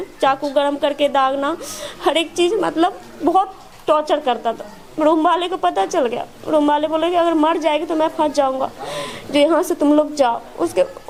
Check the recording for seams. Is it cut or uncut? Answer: uncut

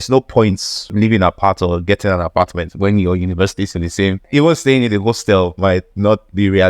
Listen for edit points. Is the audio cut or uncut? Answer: cut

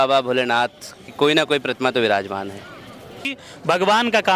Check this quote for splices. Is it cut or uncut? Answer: cut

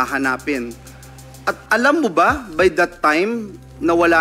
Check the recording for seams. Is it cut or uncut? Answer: uncut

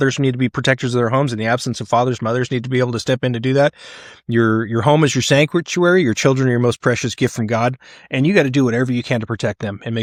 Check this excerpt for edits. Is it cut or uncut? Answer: uncut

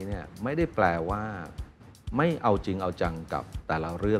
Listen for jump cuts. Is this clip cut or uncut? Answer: uncut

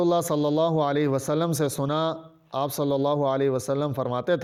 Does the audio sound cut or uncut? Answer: uncut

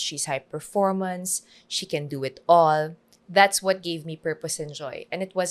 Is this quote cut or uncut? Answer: uncut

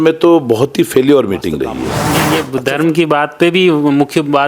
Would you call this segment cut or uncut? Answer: cut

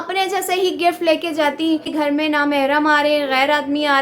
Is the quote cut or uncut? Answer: cut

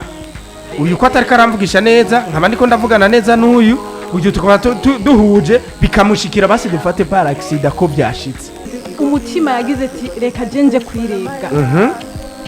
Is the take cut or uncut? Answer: cut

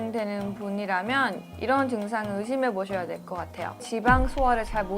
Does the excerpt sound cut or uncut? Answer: cut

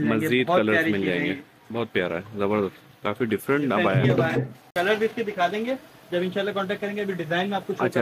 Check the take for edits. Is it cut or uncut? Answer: cut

